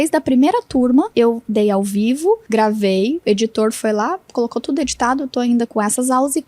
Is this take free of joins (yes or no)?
no